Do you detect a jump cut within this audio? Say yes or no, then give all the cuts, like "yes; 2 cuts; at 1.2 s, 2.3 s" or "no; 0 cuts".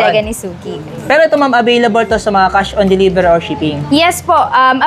no; 0 cuts